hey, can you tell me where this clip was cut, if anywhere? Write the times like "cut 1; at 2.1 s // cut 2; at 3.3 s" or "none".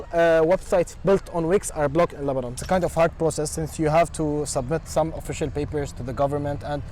cut 1; at 2.6 s